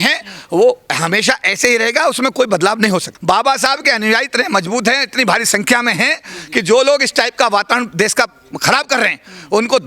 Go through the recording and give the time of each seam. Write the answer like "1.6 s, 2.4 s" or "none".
3.1 s